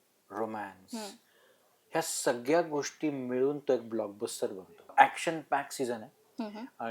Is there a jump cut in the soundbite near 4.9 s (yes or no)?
yes